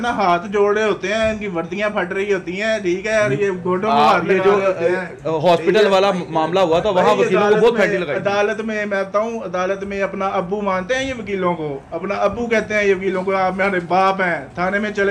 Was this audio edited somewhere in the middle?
no; 0 cuts

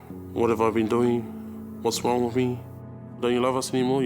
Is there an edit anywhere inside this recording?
yes; 1 cut; at 2.8 s

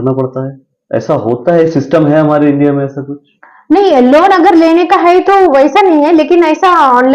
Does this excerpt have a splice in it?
no; 0 cuts

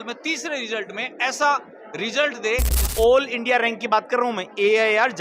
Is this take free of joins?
no; 1 cut; at 2.8 s

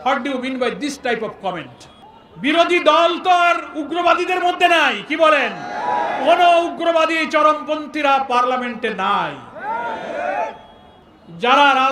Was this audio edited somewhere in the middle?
no; 0 cuts

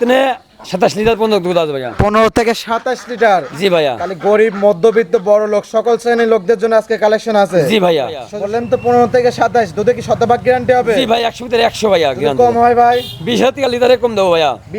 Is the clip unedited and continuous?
no; 1 cut; at 8.3 s

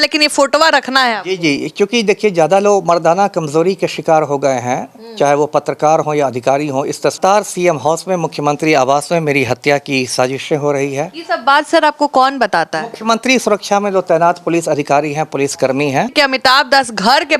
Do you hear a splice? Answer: yes; 2 cuts; at 7.2 s, 16.1 s

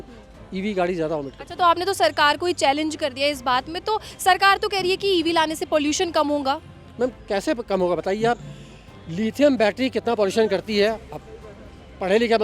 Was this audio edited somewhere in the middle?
no; 0 cuts

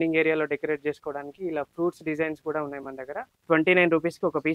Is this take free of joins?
no; 1 cut; at 3.3 s

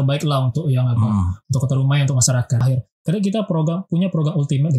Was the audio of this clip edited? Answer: yes; 1 cut; at 2.6 s

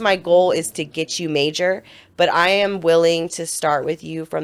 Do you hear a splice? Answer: no; 0 cuts

